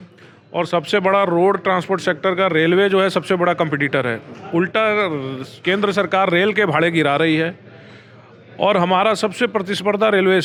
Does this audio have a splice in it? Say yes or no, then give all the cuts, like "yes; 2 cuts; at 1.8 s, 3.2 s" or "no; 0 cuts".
no; 0 cuts